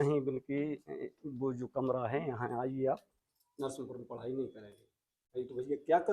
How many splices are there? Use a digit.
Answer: 1